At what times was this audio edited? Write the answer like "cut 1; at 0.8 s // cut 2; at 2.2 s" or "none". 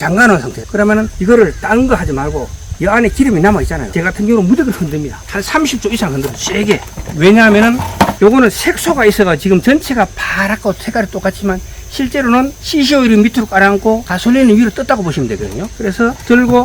none